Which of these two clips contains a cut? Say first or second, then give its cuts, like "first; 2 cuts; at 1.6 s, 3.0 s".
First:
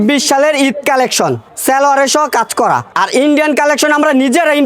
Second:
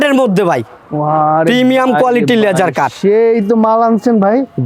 first; 2 cuts; at 1.5 s, 2.9 s